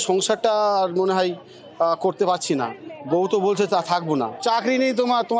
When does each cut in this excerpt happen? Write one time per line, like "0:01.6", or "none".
none